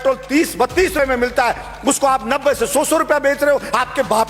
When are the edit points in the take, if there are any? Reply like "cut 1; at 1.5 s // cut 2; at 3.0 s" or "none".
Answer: cut 1; at 1.0 s